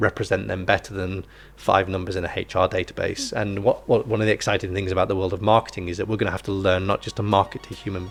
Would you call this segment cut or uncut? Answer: uncut